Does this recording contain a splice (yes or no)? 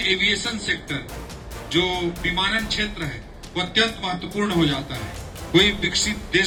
no